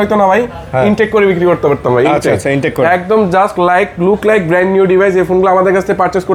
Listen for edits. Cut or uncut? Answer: uncut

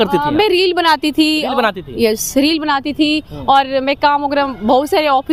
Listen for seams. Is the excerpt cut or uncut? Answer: uncut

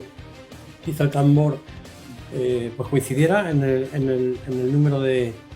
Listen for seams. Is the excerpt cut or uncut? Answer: uncut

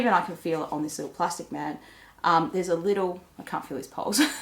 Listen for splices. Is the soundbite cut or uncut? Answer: uncut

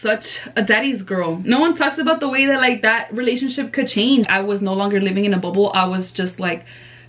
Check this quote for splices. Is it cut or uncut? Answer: cut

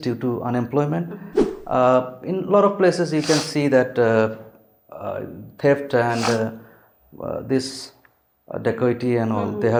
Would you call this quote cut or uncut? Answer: uncut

